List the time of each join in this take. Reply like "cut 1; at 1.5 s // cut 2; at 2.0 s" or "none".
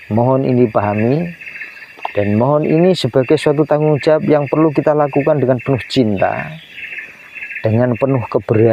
none

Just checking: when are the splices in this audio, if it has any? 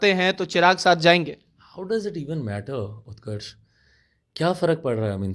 none

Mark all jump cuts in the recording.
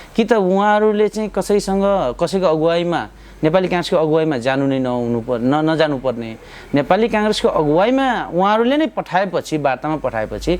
none

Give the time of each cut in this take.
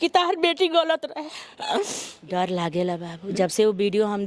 cut 1; at 2.1 s

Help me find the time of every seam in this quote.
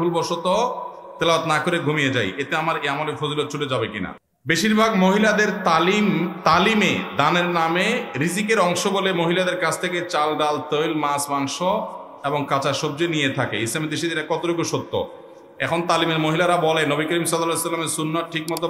cut 1; at 4.2 s

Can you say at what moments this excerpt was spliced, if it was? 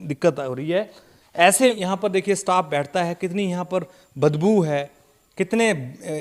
cut 1; at 1.7 s

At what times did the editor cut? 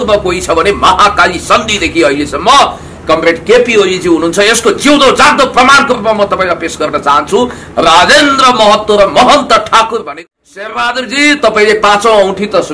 cut 1; at 10.1 s

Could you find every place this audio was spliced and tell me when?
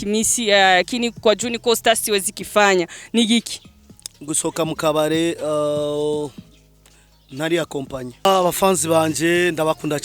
cut 1; at 8.2 s

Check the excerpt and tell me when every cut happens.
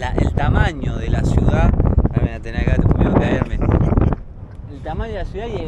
none

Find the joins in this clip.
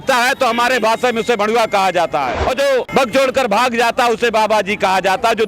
cut 1; at 2.6 s

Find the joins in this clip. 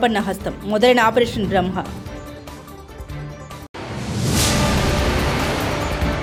none

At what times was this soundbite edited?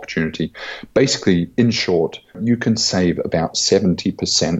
cut 1; at 2.4 s

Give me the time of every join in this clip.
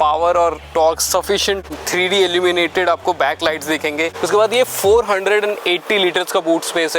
cut 1; at 1.7 s // cut 2; at 4.1 s

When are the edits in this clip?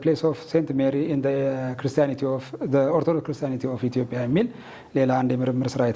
none

